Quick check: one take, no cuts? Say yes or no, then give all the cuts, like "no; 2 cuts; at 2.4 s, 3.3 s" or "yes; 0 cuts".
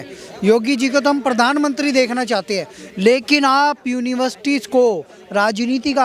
yes; 0 cuts